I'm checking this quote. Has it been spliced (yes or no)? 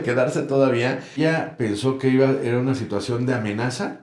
yes